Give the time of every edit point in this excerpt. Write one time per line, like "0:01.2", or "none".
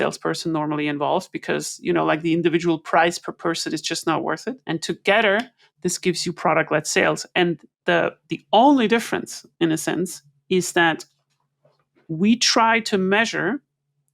0:04.6